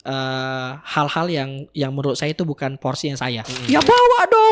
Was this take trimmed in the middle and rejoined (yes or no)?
yes